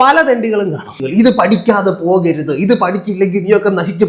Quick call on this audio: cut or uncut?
cut